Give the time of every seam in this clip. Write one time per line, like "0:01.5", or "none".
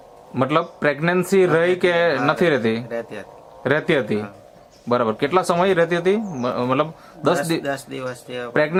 none